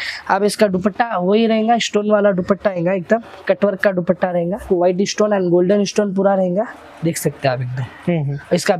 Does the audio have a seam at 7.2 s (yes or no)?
no